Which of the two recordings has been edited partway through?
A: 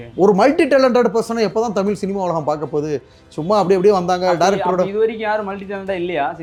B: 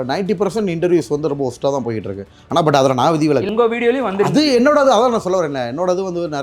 B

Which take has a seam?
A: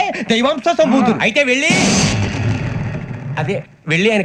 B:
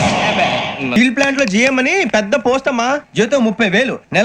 B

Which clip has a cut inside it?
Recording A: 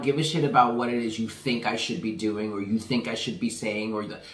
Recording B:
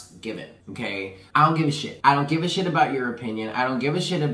B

